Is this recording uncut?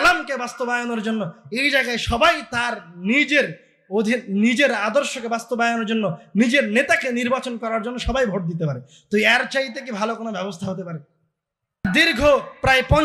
no; 1 cut; at 11.8 s

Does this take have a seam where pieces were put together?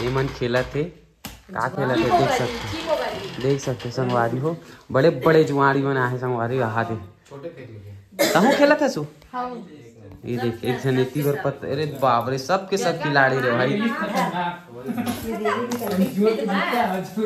no; 0 cuts

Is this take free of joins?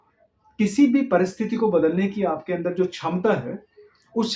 yes; 0 cuts

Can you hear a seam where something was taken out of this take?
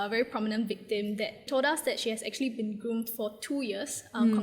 yes; 1 cut; at 1.5 s

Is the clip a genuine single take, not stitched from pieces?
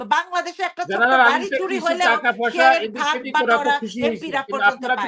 yes; 0 cuts

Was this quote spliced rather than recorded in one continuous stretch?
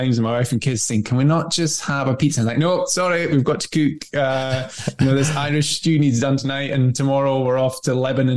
no; 0 cuts

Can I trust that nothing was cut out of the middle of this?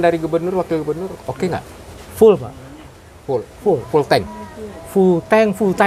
yes; 0 cuts

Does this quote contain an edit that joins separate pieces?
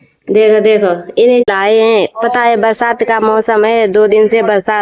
yes; 1 cut; at 1.5 s

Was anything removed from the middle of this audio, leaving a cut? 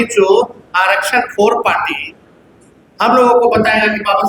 no; 0 cuts

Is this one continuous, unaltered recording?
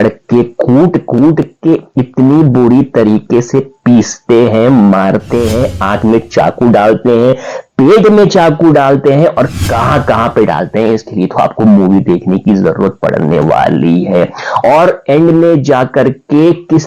yes; 0 cuts

